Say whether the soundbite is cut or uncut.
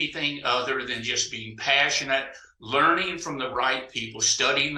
uncut